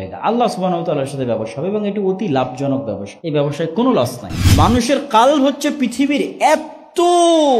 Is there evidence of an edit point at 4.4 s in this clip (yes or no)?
yes